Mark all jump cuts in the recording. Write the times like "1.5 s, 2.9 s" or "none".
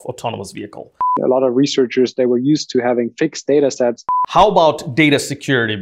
1.2 s, 4.1 s